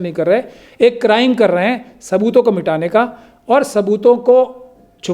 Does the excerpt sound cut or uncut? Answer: uncut